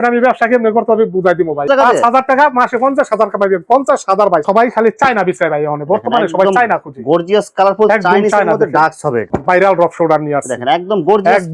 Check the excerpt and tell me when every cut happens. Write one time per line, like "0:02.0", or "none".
0:01.6
0:04.4
0:09.3